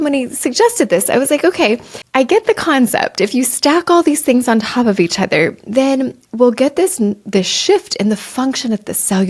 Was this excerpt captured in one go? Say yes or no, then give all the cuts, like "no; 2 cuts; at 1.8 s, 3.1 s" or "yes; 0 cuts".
no; 1 cut; at 1.9 s